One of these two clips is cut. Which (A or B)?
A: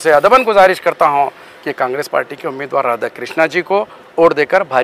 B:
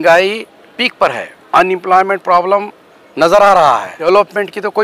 B